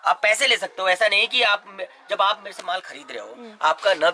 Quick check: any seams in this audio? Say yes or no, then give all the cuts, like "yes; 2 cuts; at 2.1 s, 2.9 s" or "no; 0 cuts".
no; 0 cuts